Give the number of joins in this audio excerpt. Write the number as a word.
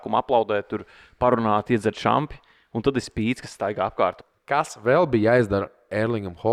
one